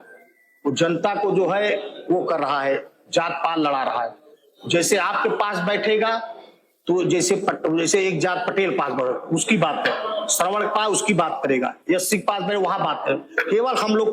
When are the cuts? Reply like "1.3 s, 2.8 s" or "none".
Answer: none

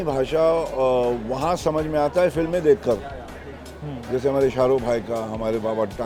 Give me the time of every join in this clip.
none

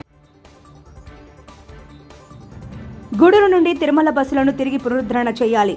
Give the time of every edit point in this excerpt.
1.6 s, 2.8 s

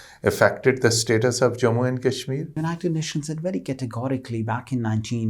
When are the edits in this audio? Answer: 2.6 s

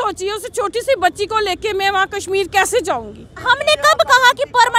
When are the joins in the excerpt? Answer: 3.4 s

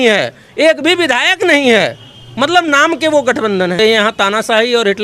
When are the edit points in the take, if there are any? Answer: 3.8 s

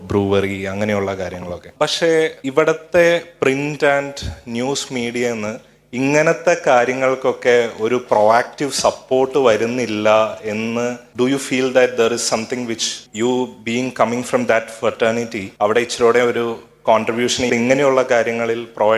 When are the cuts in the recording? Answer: 1.6 s, 2.4 s, 11.0 s, 12.9 s, 15.4 s, 17.5 s

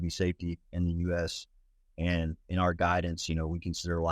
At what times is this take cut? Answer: 2.4 s

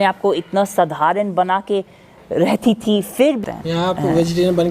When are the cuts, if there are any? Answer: 3.5 s

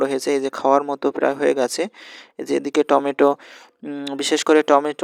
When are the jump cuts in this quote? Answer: none

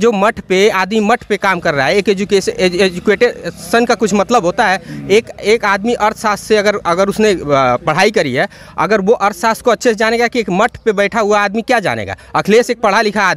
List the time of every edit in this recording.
none

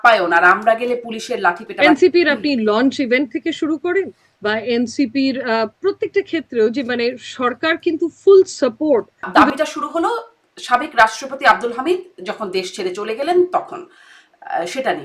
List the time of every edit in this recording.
1.7 s, 9.3 s

